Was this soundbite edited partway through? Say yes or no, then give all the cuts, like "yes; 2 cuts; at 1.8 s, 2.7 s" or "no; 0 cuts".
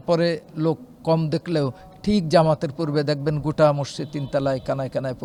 no; 0 cuts